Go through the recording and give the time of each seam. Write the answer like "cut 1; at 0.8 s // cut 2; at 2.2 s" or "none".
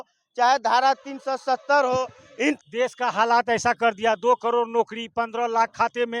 cut 1; at 2.6 s